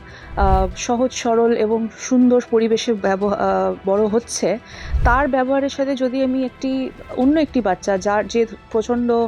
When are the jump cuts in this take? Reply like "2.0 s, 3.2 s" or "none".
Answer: none